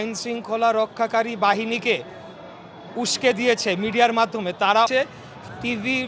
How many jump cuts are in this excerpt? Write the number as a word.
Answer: one